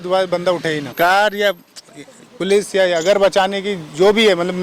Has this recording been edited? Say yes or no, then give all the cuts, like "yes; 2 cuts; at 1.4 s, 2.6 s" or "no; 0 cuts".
yes; 1 cut; at 0.9 s